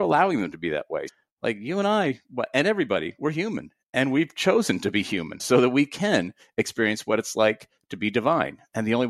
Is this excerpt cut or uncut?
cut